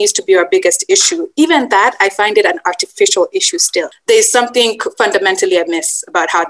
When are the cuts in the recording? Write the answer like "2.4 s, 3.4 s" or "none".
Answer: 3.9 s